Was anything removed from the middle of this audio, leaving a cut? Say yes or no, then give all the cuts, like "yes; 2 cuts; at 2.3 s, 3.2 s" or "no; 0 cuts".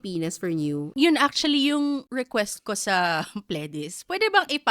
yes; 2 cuts; at 0.9 s, 2.1 s